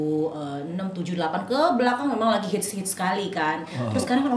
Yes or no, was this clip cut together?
no